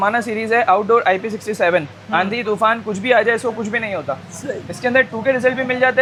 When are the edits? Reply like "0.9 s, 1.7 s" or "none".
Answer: none